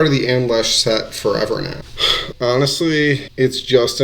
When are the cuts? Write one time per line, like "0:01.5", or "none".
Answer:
0:02.2